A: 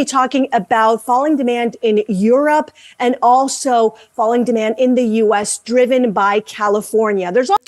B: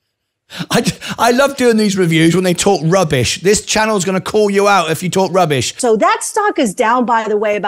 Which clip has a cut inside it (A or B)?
B